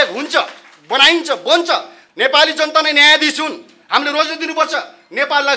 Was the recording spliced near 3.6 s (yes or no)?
no